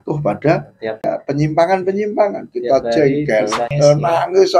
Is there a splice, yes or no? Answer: yes